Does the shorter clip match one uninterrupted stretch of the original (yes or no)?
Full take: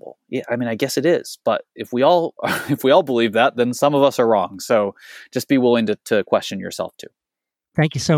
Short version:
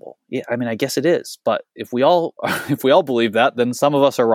yes